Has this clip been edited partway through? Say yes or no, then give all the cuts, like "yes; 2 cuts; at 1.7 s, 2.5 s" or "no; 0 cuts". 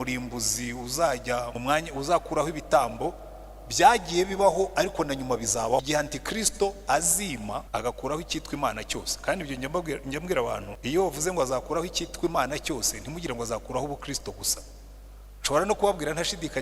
yes; 4 cuts; at 1.5 s, 5.8 s, 7.7 s, 10.7 s